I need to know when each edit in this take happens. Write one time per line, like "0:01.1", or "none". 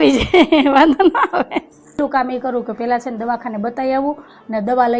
0:02.0